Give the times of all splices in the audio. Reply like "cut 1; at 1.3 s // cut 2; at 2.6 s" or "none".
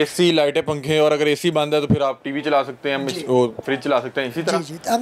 none